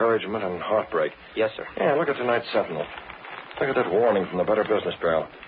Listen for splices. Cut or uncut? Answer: uncut